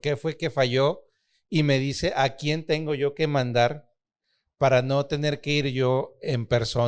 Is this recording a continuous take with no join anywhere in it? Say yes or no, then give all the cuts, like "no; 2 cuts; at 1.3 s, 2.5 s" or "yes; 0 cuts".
yes; 0 cuts